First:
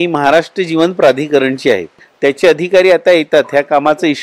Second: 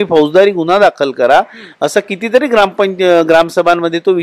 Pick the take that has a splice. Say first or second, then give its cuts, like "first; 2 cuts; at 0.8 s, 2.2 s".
first; 1 cut; at 2.0 s